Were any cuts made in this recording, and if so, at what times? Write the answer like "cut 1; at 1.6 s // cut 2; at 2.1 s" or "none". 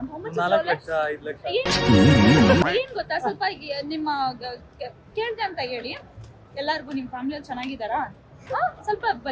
none